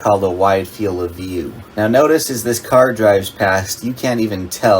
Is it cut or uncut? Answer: cut